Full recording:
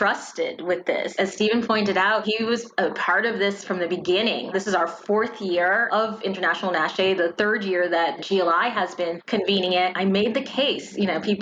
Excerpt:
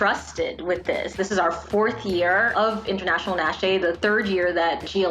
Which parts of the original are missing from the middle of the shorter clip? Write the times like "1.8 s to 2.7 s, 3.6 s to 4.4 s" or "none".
1.1 s to 4.5 s